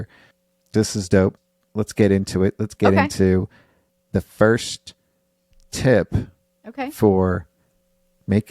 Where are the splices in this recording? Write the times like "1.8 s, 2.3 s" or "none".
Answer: none